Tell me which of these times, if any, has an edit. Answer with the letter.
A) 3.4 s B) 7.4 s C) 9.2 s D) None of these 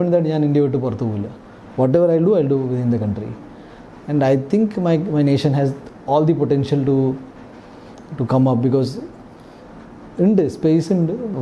D